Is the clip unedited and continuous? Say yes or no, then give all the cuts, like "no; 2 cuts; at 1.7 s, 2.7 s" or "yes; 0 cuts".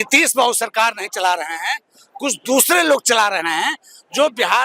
yes; 0 cuts